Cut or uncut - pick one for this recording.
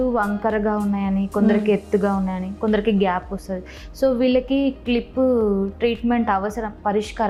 uncut